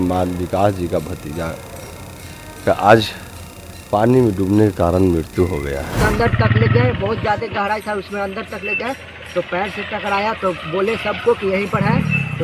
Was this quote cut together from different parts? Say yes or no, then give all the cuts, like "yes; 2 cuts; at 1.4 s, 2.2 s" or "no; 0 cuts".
yes; 1 cut; at 6.0 s